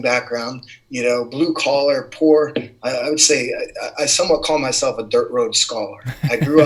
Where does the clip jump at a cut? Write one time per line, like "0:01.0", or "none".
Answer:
none